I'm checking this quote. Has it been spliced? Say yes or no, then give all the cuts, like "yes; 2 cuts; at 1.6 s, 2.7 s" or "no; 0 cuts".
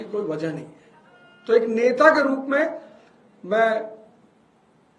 no; 0 cuts